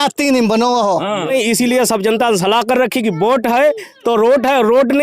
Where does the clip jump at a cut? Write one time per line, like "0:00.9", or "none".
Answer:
0:01.3